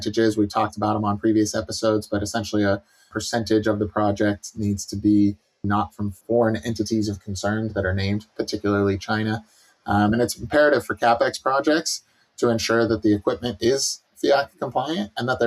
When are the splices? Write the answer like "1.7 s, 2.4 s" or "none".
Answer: 3.1 s, 5.7 s